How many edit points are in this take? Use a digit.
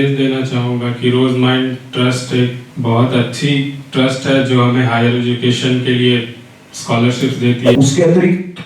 2